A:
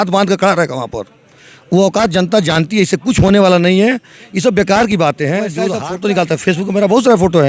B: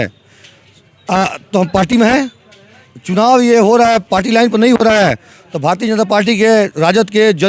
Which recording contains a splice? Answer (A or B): A